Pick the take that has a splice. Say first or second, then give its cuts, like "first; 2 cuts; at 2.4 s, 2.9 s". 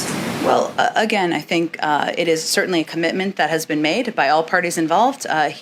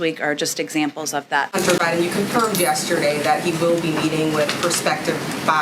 second; 1 cut; at 1.5 s